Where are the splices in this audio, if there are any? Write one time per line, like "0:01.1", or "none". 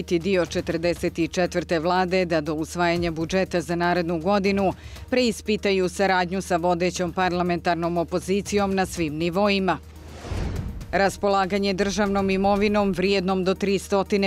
none